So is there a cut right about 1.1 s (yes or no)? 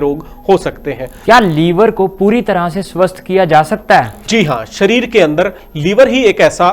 yes